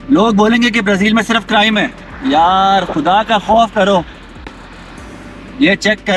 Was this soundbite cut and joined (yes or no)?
no